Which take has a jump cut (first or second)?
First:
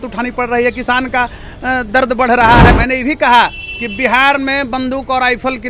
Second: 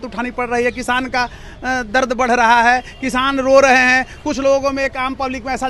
first